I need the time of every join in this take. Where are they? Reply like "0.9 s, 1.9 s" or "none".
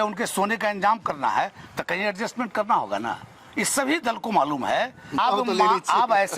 5.2 s